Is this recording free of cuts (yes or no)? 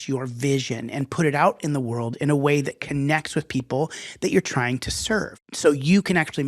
no